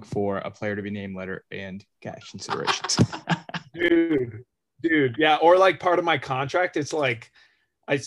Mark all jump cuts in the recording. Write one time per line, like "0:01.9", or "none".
0:03.9